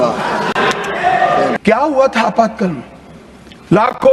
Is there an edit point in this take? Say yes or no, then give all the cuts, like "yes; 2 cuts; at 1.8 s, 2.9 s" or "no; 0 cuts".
yes; 1 cut; at 1.6 s